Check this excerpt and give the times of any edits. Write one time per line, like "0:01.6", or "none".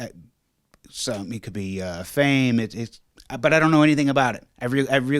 none